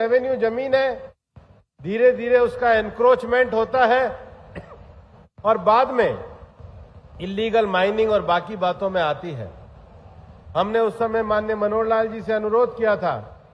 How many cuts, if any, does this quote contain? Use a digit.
0